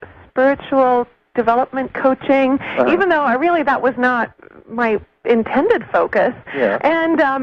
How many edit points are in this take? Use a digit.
0